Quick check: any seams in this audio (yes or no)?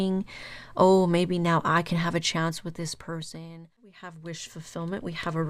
yes